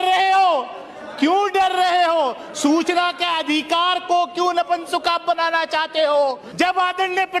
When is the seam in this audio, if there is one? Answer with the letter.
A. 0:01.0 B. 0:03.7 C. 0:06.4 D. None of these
C